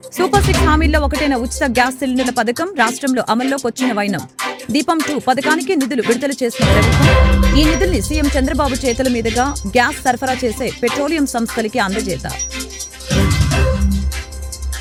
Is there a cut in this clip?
no; 0 cuts

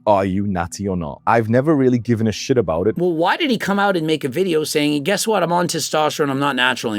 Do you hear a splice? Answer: yes; 1 cut; at 3.0 s

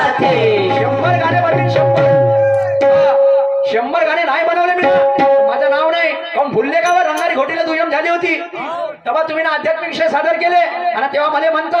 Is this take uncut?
yes; 0 cuts

